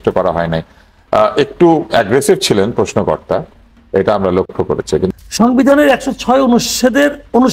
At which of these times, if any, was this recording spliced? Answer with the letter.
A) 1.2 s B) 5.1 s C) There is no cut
B